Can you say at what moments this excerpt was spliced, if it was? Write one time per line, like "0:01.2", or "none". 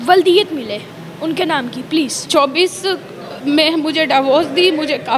0:02.2